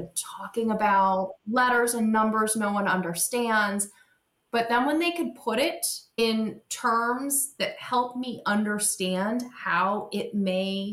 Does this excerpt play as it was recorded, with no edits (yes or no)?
yes